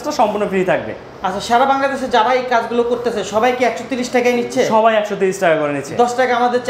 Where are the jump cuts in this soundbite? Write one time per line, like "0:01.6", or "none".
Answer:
none

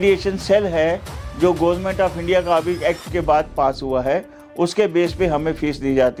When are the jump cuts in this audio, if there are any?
none

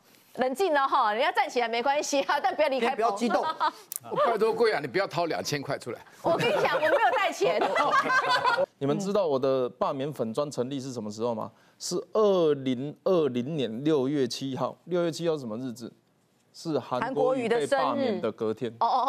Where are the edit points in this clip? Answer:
0:08.6

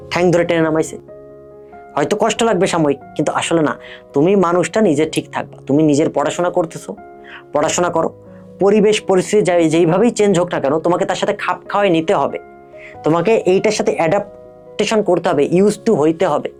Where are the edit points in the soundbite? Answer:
none

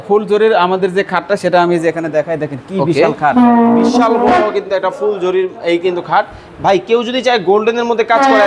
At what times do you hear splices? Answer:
none

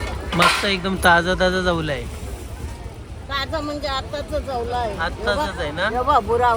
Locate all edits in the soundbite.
none

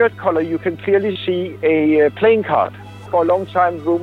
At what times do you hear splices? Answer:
0:03.0

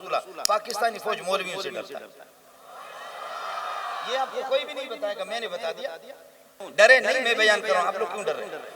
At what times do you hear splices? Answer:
0:06.6

